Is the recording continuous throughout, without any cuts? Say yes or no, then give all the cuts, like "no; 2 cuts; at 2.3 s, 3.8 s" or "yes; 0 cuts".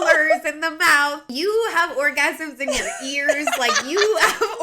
no; 1 cut; at 1.2 s